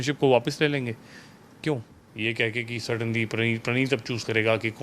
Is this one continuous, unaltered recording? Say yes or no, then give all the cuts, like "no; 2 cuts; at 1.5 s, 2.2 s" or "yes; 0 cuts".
no; 1 cut; at 2.0 s